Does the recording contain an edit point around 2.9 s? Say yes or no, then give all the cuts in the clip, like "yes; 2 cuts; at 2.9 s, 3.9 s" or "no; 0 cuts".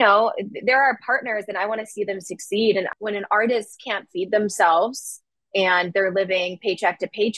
yes; 1 cut; at 2.9 s